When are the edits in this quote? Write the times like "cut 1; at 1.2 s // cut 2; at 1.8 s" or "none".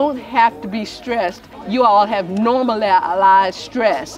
cut 1; at 1.5 s